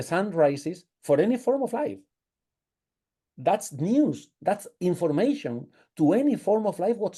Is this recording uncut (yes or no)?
yes